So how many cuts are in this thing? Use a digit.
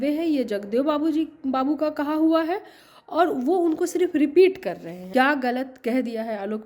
1